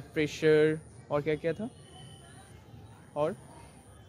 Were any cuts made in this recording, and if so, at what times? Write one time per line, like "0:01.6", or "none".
none